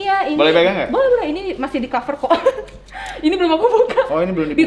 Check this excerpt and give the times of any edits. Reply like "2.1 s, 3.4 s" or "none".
none